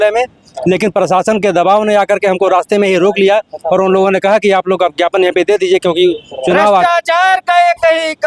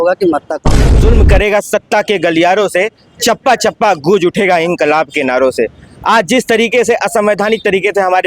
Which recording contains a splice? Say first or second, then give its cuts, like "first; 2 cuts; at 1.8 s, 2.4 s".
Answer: second; 1 cut; at 1.0 s